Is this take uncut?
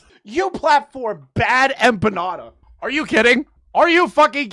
yes; 0 cuts

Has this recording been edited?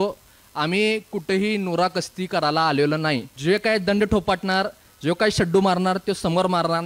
yes; 1 cut; at 3.3 s

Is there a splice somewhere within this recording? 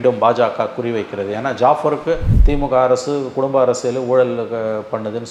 yes; 1 cut; at 2.3 s

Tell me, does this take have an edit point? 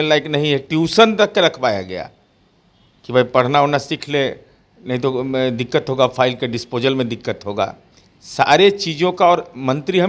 no; 0 cuts

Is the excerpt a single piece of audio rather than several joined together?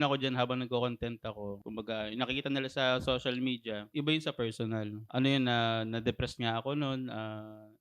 yes; 0 cuts

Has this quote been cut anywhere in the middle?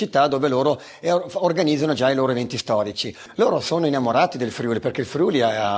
yes; 1 cut; at 3.2 s

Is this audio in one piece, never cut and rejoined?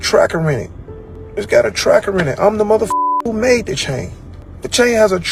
yes; 0 cuts

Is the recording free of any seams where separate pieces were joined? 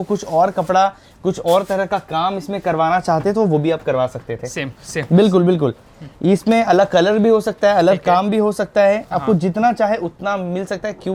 yes; 0 cuts

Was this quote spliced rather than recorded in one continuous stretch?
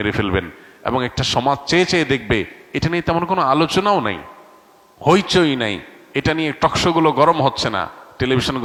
no; 0 cuts

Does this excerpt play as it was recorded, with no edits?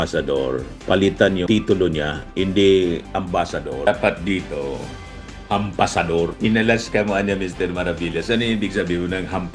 yes; 0 cuts

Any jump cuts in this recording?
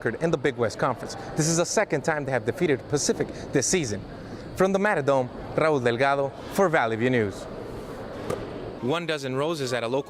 yes; 1 cut; at 8.7 s

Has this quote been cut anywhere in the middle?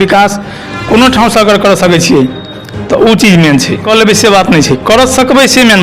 yes; 1 cut; at 3.8 s

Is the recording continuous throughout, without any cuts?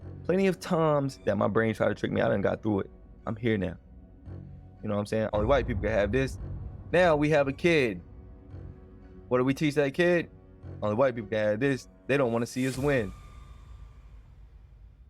no; 1 cut; at 5.3 s

